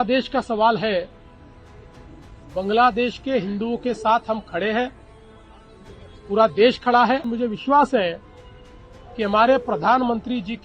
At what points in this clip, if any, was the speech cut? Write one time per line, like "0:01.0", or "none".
0:07.3